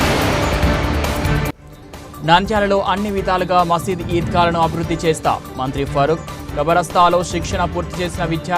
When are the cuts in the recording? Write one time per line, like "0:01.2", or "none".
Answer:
none